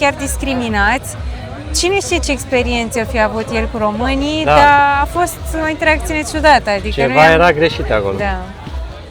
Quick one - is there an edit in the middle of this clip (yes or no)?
no